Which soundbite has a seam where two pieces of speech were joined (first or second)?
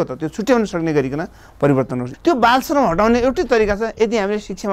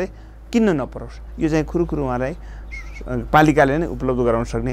first